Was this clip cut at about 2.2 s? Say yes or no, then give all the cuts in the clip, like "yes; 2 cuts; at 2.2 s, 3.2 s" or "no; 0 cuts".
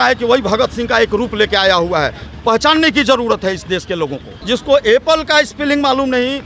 no; 1 cut; at 4.3 s